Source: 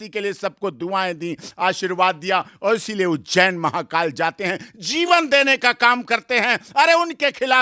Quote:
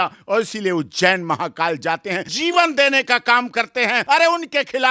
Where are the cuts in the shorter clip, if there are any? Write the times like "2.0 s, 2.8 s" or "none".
2.3 s, 4.0 s